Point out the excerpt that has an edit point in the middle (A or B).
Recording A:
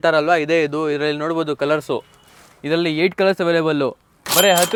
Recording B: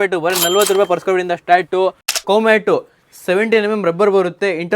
B